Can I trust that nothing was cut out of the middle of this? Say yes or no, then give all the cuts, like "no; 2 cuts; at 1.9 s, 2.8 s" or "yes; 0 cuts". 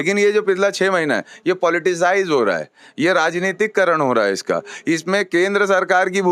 yes; 0 cuts